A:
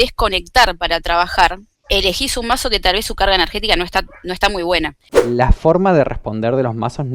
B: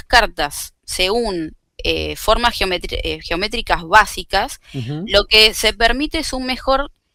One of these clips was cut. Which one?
A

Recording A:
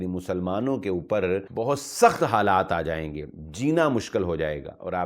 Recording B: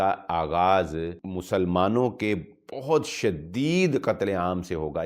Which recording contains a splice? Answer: A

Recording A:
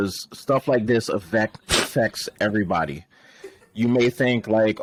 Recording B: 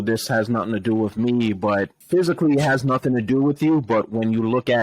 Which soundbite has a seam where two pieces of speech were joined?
B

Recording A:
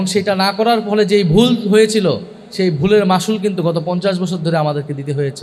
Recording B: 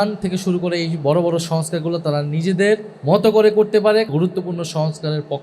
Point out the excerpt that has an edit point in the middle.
B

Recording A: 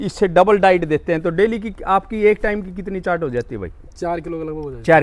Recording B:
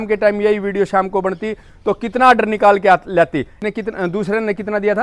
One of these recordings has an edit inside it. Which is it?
B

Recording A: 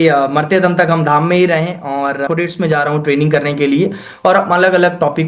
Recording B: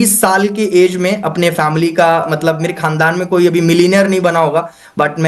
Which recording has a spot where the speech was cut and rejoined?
A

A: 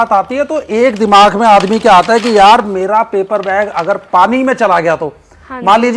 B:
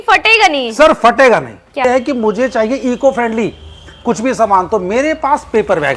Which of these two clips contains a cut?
B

